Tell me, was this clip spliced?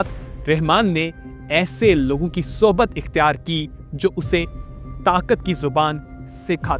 no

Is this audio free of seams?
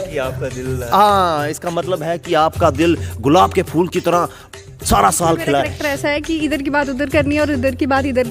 no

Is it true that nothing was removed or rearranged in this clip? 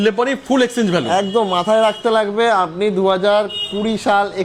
yes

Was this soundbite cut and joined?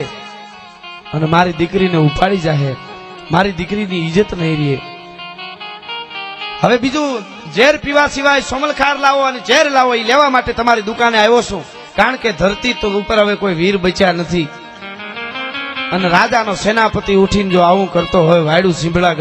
no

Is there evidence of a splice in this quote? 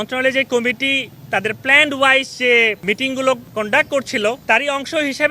yes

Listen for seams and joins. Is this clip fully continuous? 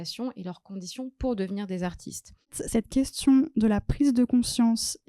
no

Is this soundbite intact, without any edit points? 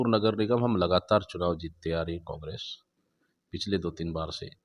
yes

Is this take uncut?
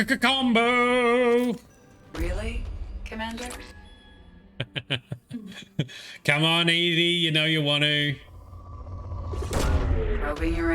no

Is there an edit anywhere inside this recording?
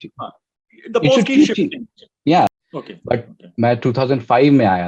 yes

